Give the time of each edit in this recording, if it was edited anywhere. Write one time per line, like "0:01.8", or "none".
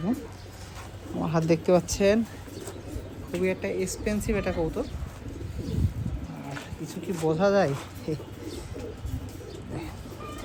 none